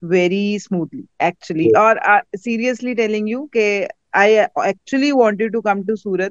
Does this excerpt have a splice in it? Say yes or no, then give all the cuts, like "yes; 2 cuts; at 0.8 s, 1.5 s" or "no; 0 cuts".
no; 0 cuts